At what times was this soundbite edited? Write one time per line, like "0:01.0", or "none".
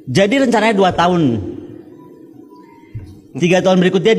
none

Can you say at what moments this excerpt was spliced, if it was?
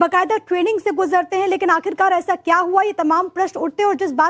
none

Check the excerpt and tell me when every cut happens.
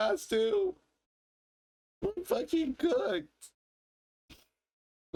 none

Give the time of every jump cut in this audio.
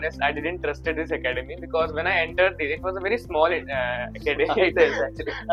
none

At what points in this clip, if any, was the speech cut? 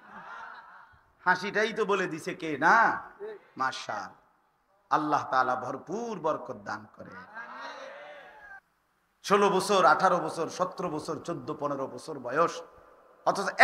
0:08.3

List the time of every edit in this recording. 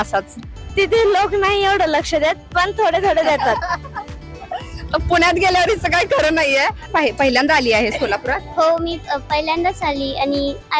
none

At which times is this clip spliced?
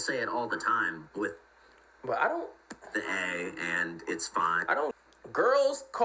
0:04.9

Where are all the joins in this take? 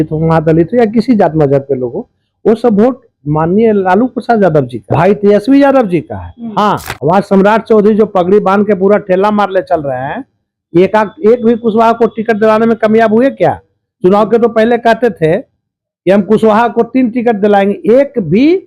0:04.8
0:06.9

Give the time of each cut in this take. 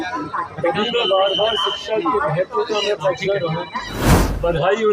0:04.0

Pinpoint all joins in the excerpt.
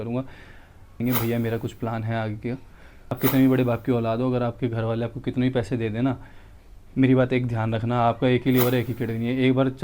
0:01.0
0:03.2

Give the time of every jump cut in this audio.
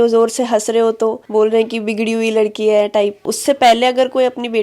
0:03.2

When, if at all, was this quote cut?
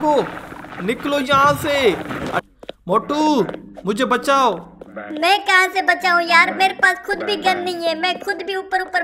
0:02.4

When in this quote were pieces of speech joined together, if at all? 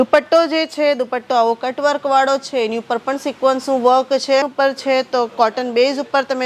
0:04.5

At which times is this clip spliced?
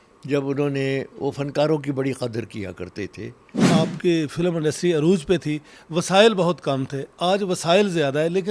0:03.7

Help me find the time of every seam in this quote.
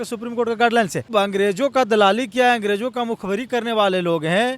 0:01.1

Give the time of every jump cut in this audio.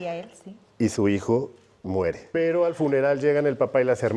0:02.2

